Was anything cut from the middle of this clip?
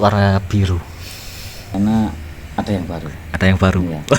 yes; 1 cut; at 1.7 s

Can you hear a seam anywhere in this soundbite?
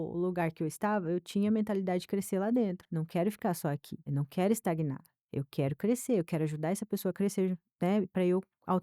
yes; 2 cuts; at 2.8 s, 3.9 s

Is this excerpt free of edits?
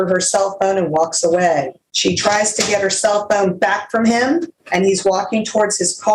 no; 2 cuts; at 1.8 s, 4.6 s

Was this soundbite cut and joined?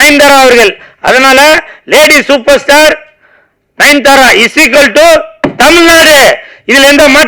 no; 0 cuts

